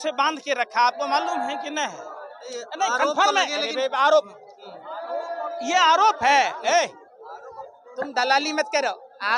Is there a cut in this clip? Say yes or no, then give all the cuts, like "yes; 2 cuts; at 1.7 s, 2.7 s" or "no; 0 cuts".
no; 0 cuts